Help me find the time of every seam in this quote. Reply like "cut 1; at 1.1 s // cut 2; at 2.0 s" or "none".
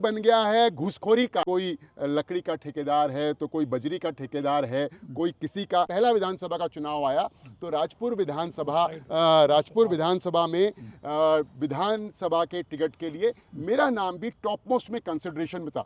cut 1; at 1.5 s // cut 2; at 5.9 s